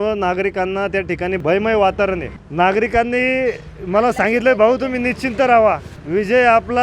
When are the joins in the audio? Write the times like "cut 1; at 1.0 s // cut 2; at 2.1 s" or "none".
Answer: cut 1; at 1.4 s // cut 2; at 2.4 s // cut 3; at 5.9 s